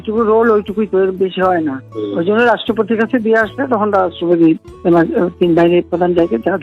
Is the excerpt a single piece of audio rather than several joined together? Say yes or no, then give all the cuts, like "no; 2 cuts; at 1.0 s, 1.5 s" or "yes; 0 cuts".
yes; 0 cuts